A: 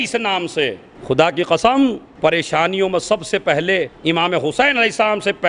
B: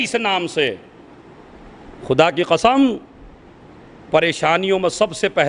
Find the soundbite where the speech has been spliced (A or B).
A